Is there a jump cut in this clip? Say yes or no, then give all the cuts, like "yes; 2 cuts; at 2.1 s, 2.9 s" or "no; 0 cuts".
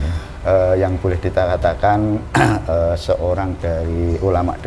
no; 0 cuts